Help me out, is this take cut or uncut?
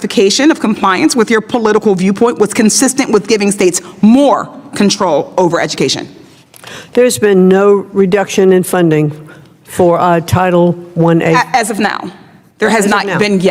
uncut